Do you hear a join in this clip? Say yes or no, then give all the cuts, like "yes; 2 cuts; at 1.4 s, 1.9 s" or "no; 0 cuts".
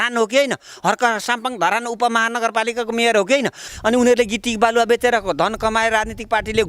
yes; 1 cut; at 3.6 s